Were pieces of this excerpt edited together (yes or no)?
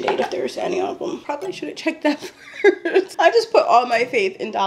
yes